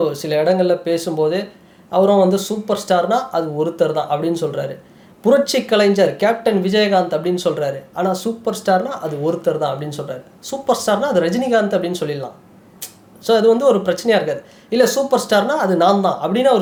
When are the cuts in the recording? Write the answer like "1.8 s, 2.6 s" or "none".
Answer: none